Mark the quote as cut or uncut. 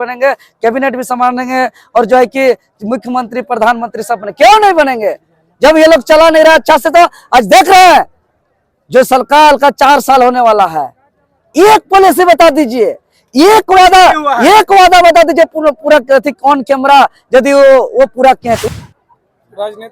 cut